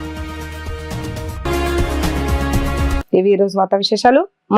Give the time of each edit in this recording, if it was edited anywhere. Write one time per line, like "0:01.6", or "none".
none